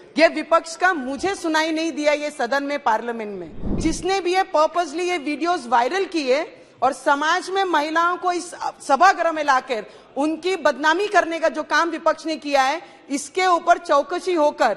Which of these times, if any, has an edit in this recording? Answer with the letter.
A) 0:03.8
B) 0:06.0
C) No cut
A